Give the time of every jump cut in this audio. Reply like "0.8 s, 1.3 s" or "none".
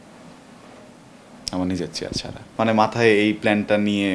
2.4 s